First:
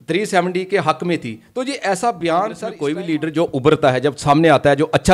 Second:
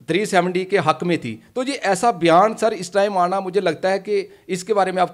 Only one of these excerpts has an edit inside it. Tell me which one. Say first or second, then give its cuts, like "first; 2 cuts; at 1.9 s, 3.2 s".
first; 1 cut; at 2.7 s